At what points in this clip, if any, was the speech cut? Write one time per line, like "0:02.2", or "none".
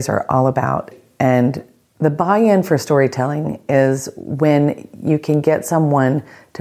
0:00.9